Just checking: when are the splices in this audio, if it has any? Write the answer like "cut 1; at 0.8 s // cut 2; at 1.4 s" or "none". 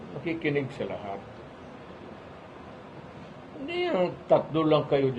cut 1; at 2.3 s